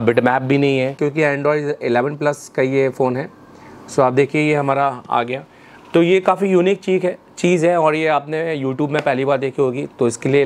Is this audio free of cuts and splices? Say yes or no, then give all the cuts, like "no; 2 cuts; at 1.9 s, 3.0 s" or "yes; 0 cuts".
no; 1 cut; at 0.9 s